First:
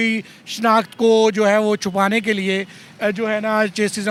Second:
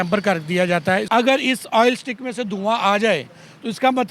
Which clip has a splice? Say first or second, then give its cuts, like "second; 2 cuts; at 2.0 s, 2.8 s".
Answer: second; 1 cut; at 1.0 s